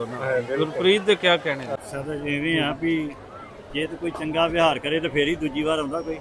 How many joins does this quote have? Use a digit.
1